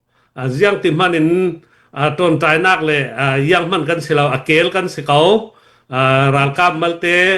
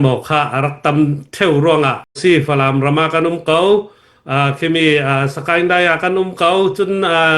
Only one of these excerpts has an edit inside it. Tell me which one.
second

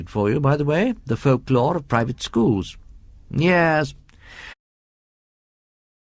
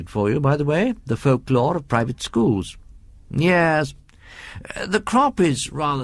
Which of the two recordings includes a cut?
second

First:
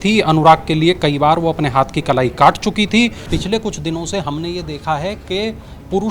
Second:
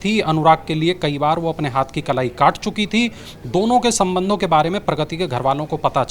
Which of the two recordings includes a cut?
first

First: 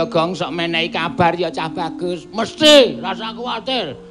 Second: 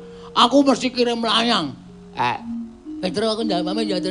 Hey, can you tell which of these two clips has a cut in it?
second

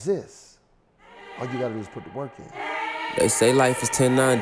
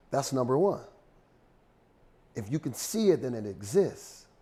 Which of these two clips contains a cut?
first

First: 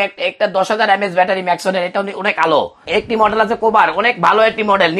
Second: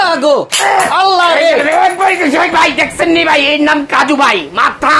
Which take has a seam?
first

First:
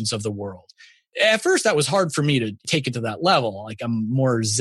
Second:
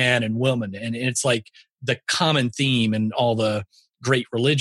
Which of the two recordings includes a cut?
first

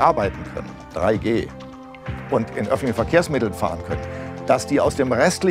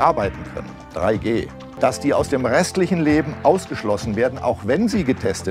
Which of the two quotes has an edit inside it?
second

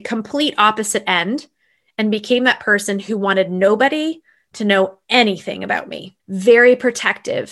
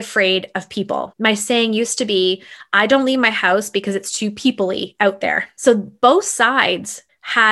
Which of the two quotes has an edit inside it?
second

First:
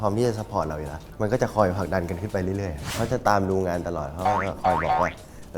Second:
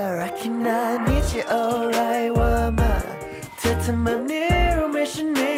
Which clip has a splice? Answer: first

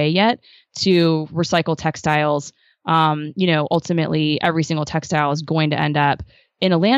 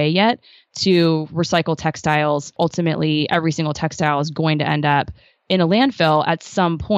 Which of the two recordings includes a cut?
second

